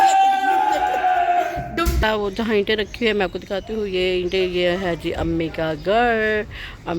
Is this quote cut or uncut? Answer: cut